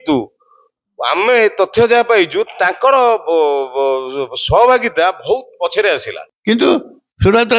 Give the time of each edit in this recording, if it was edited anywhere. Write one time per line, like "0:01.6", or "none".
0:06.4

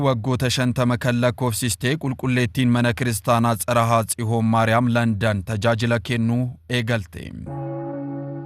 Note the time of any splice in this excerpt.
0:07.5

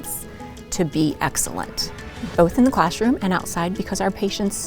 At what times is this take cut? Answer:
0:02.2

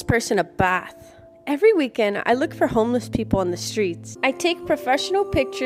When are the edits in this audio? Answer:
0:04.1

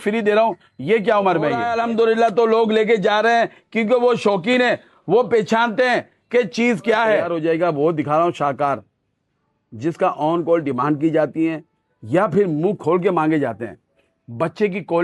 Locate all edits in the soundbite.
0:01.7
0:07.2

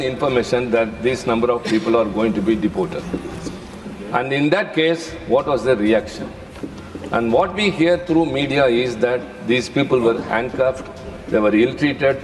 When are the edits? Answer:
none

